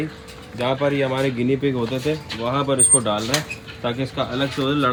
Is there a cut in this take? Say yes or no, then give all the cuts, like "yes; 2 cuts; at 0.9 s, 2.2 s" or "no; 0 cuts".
no; 0 cuts